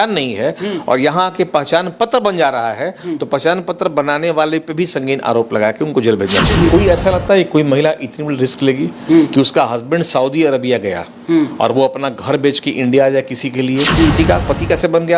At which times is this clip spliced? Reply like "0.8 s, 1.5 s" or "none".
6.7 s, 14.1 s